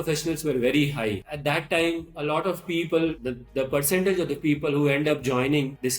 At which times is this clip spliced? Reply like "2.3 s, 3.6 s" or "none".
1.2 s, 3.2 s